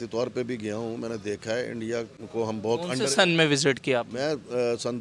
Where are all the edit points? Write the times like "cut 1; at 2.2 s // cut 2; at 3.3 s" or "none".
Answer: none